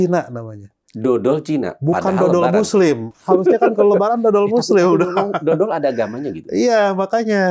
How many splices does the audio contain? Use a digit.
0